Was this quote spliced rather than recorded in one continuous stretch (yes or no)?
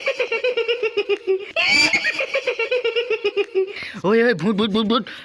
yes